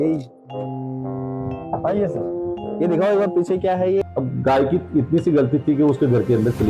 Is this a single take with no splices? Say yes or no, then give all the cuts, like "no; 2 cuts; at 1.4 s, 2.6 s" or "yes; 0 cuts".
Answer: no; 1 cut; at 4.0 s